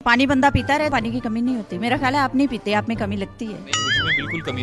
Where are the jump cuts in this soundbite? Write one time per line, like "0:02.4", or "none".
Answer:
0:00.9